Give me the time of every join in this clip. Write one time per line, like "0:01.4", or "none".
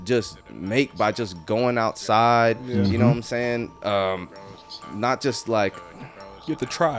none